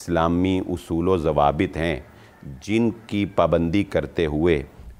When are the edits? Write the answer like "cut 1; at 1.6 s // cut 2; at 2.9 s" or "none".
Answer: none